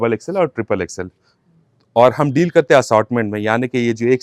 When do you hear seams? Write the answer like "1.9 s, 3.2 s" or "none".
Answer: none